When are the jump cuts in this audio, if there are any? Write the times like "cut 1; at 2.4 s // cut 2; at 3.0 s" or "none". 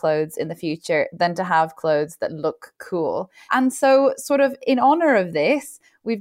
cut 1; at 3.3 s